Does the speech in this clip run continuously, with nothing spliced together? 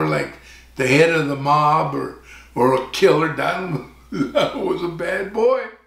yes; 0 cuts

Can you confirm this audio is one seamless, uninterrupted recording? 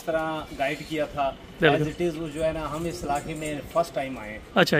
yes; 0 cuts

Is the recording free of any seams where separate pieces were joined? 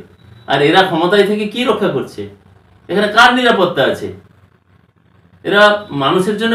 yes; 0 cuts

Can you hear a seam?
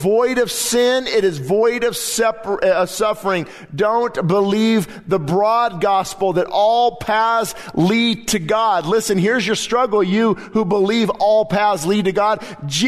no; 0 cuts

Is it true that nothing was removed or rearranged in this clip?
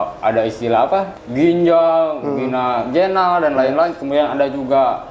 no; 1 cut; at 1.1 s

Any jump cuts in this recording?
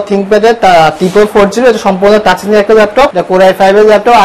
yes; 1 cut; at 3.2 s

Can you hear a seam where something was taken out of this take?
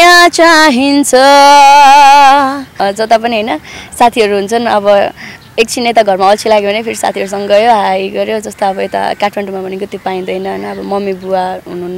yes; 1 cut; at 2.8 s

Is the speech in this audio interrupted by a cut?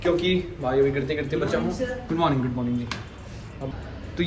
no; 0 cuts

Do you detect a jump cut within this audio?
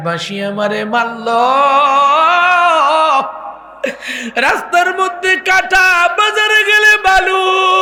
no; 0 cuts

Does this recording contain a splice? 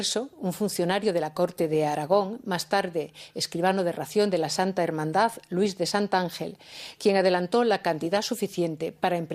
yes; 1 cut; at 2.3 s

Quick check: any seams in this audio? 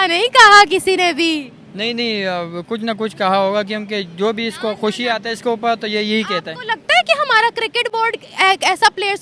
no; 0 cuts

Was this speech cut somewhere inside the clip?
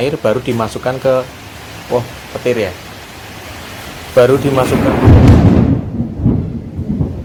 no; 0 cuts

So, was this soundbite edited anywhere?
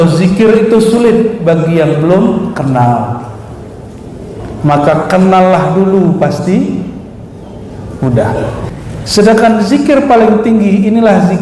yes; 1 cut; at 8.7 s

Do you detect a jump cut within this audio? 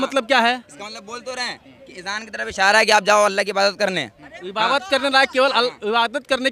no; 0 cuts

